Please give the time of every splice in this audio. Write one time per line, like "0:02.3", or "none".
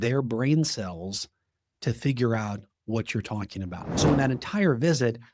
0:03.8